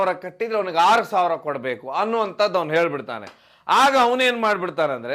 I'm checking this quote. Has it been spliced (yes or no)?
no